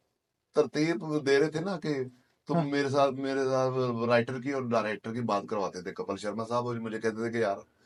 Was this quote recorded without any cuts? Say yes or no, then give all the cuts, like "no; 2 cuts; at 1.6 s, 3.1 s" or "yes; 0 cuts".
yes; 0 cuts